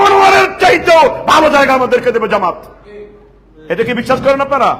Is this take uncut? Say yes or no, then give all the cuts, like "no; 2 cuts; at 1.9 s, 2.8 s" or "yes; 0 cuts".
yes; 0 cuts